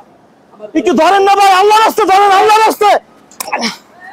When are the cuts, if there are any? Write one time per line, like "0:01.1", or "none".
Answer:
none